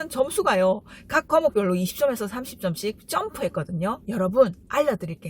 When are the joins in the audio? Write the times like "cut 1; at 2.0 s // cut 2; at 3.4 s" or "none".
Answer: cut 1; at 4.0 s